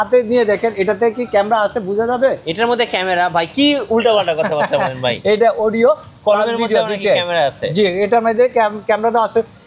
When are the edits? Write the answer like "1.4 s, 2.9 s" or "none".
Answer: none